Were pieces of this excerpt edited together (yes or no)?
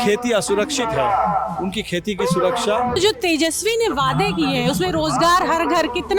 yes